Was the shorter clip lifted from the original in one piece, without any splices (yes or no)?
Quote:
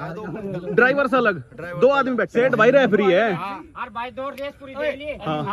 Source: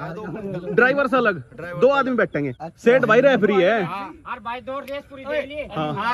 no